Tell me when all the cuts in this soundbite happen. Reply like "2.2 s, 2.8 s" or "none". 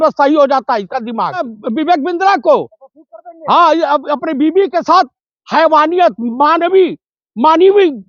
1.5 s

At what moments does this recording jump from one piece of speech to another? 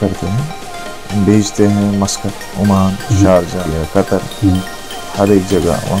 3.7 s

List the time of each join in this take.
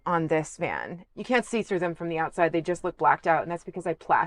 1.0 s

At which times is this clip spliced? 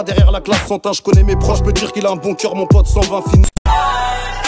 3.4 s

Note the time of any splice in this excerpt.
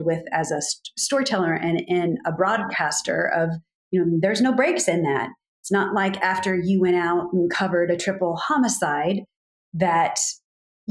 none

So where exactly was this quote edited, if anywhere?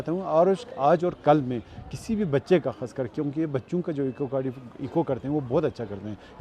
none

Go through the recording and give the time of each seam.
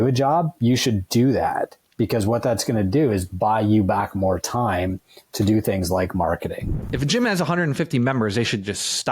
6.7 s

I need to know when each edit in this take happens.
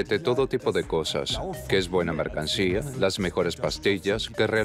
none

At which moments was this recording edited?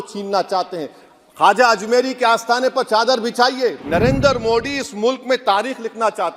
3.8 s

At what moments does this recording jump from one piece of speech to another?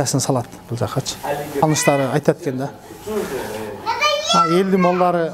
1.6 s

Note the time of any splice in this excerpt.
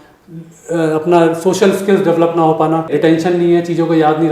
2.9 s

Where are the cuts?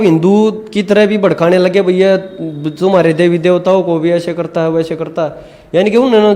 none

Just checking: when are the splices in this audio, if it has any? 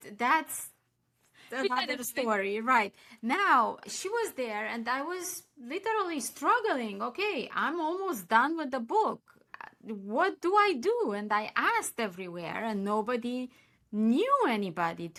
none

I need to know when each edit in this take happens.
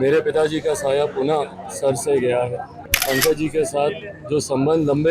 2.9 s

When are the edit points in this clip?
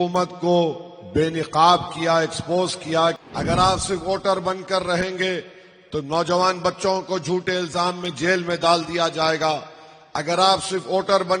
3.2 s

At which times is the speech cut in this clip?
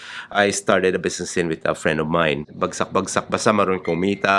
2.5 s

